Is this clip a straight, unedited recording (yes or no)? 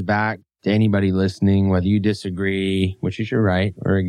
yes